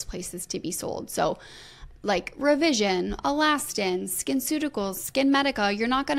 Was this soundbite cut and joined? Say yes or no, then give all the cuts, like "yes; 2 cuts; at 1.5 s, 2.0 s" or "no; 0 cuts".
no; 0 cuts